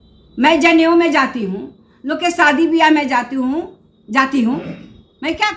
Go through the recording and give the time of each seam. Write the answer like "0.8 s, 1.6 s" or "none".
none